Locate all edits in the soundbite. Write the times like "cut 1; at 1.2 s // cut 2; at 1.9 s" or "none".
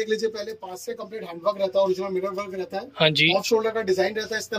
none